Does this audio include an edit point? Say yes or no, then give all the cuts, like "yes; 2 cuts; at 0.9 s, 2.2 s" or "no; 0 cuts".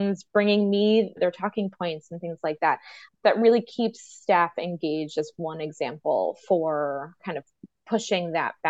yes; 2 cuts; at 1.2 s, 7.2 s